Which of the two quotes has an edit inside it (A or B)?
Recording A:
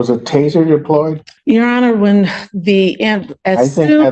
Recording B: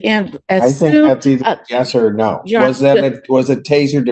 A